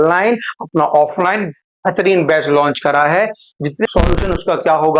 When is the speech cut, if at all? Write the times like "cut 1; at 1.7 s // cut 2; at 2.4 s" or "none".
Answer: cut 1; at 3.9 s